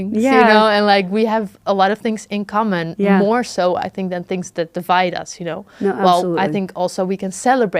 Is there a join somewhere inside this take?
no; 0 cuts

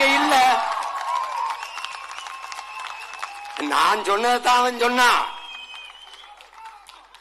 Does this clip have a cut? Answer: no; 0 cuts

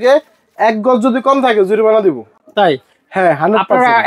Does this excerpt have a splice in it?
no; 0 cuts

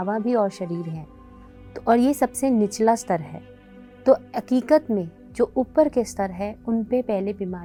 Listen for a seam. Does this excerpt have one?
no; 0 cuts

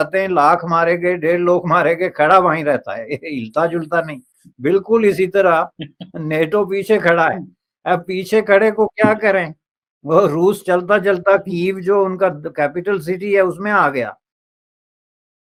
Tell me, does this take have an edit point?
no; 0 cuts

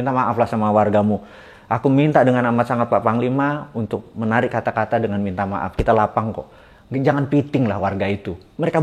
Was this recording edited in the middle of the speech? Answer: no; 0 cuts

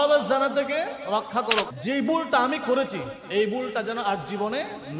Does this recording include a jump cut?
yes; 1 cut; at 1.7 s

